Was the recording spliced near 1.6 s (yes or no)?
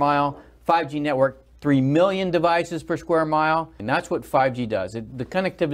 no